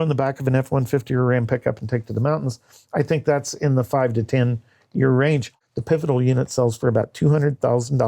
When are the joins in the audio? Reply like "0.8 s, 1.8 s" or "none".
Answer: 5.5 s